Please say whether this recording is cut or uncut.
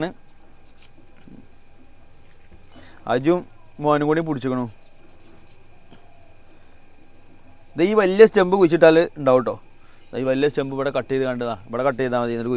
uncut